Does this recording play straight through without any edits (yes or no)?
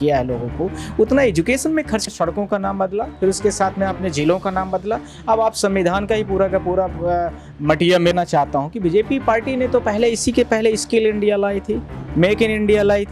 no